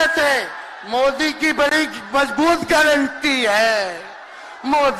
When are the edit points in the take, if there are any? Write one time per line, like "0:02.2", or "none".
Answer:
none